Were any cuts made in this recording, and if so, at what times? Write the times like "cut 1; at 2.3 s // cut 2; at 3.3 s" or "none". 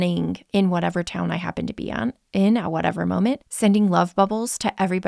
cut 1; at 3.5 s